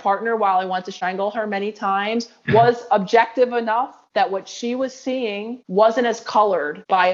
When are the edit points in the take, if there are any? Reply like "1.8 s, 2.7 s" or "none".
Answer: 0.9 s